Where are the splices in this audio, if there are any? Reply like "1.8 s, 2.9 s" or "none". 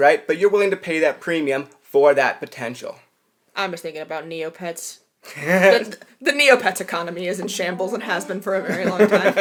none